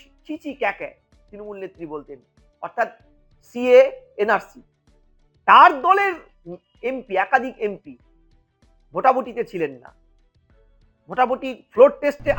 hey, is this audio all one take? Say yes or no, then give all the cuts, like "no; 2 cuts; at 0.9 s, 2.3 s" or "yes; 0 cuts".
yes; 0 cuts